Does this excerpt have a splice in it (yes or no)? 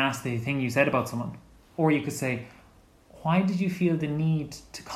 yes